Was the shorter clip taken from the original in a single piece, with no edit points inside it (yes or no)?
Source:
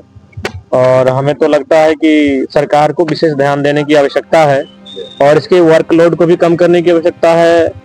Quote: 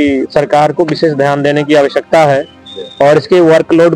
yes